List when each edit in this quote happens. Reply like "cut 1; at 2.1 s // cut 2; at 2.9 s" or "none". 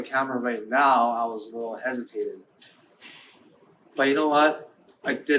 none